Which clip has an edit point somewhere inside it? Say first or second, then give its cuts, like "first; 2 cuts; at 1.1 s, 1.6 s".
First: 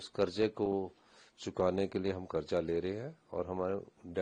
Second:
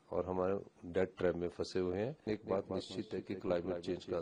second; 1 cut; at 2.3 s